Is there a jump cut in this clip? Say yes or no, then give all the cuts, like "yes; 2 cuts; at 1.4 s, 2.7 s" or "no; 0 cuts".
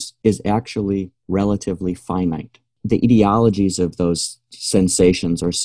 yes; 2 cuts; at 1.2 s, 2.8 s